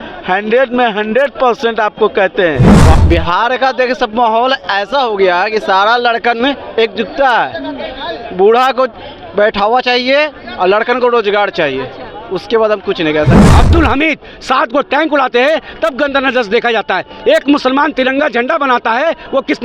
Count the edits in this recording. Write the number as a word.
two